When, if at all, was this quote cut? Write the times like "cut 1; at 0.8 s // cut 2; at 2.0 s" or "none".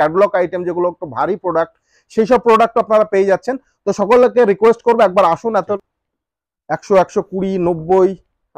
cut 1; at 5.6 s